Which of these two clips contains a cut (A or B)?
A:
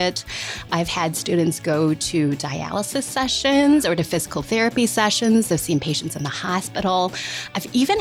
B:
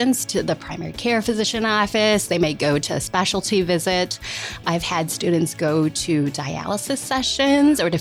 B